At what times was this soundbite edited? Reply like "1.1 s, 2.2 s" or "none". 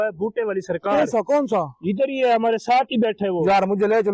none